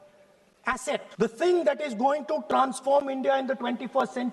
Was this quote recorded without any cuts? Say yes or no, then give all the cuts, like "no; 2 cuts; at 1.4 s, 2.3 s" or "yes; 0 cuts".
no; 1 cut; at 1.1 s